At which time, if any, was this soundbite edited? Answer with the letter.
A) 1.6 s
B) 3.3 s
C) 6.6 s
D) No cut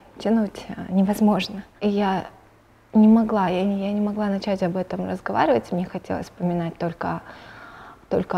A